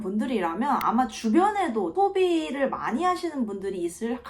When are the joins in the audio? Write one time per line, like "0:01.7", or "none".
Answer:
0:01.9